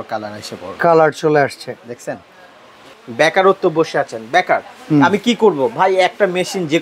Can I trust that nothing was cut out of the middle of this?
no; 1 cut; at 2.8 s

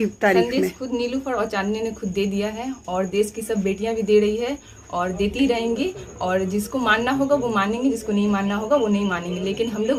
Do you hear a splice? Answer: no; 0 cuts

